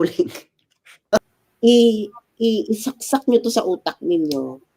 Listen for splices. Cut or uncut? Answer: cut